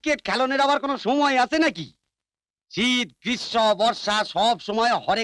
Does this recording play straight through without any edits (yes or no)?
yes